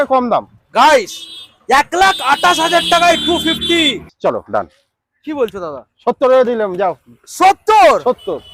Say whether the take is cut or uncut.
cut